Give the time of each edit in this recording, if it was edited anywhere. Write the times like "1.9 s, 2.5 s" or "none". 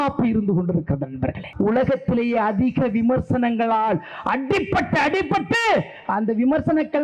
1.4 s